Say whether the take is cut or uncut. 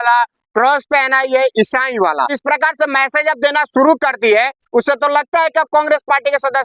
cut